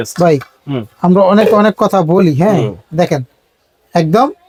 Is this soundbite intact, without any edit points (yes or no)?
yes